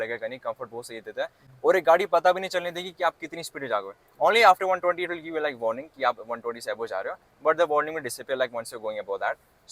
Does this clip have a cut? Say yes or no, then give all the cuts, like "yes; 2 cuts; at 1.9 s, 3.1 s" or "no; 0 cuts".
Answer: no; 0 cuts